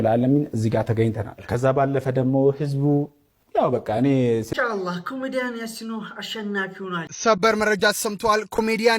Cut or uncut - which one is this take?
cut